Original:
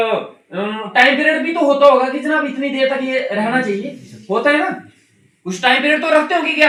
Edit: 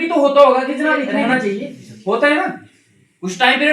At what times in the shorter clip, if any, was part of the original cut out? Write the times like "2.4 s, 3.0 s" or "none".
1.2 s